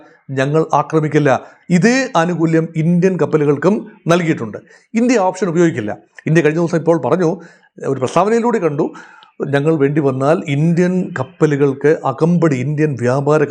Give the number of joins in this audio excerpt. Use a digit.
0